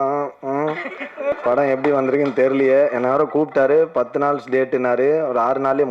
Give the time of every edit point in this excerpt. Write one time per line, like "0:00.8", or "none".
0:01.3